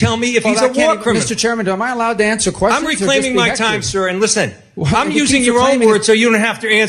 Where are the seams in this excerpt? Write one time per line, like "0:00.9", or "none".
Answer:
none